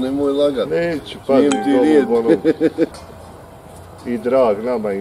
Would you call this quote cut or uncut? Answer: cut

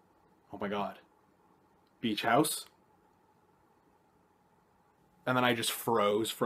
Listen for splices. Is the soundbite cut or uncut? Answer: uncut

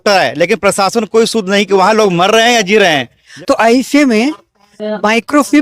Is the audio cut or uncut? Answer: cut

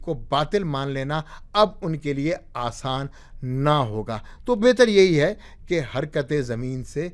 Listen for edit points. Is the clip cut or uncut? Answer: uncut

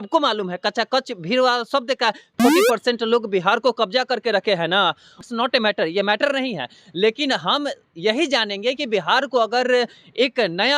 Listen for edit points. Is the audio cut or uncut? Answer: cut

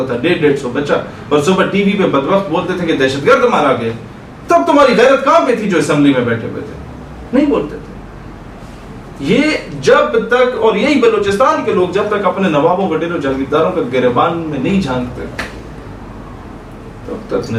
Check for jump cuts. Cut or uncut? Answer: uncut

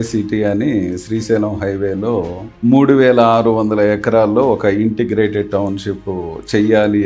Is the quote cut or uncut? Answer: uncut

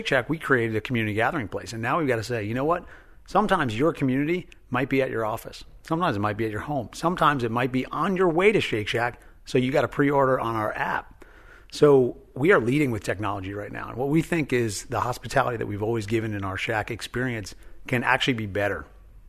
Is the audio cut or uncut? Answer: uncut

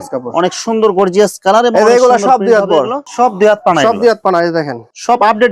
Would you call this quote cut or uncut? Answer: uncut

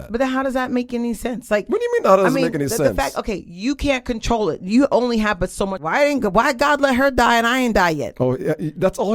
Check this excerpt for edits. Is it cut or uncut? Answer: cut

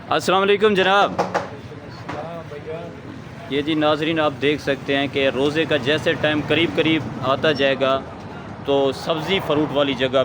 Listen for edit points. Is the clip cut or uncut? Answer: uncut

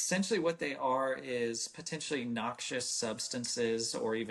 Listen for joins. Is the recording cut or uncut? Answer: uncut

